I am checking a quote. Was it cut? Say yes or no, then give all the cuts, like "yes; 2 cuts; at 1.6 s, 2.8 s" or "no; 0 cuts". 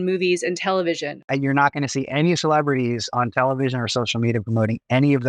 yes; 1 cut; at 1.2 s